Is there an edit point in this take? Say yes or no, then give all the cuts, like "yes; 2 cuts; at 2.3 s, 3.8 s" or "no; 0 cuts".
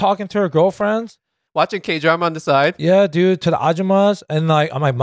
no; 0 cuts